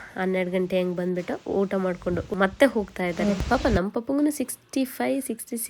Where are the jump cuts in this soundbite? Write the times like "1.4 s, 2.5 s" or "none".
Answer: 2.3 s, 3.4 s